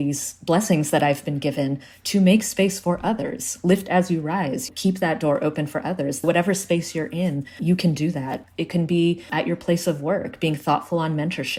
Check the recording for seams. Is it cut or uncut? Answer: uncut